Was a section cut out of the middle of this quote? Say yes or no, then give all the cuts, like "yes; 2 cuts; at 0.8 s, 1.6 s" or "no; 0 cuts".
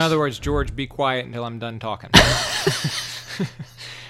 no; 0 cuts